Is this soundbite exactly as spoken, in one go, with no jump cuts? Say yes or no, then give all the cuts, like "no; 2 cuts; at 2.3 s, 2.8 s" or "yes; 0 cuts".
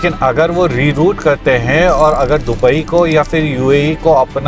yes; 0 cuts